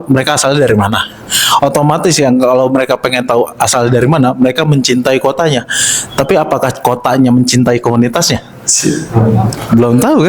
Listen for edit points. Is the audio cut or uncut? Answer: uncut